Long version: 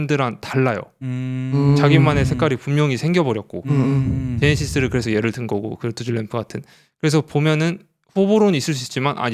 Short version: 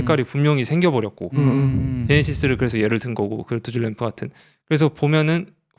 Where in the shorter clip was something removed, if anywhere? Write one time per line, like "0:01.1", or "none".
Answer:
none